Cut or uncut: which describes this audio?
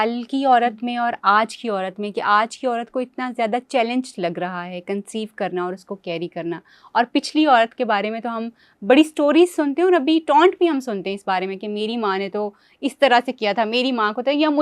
uncut